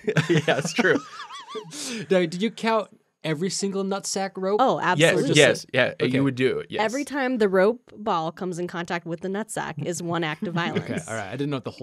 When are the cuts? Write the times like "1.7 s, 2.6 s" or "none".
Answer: 1.3 s

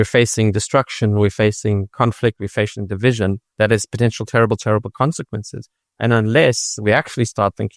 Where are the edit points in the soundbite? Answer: 3.8 s

